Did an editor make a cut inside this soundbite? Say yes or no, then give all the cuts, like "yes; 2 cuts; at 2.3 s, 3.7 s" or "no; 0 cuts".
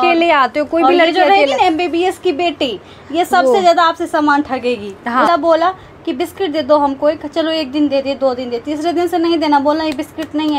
yes; 1 cut; at 5.3 s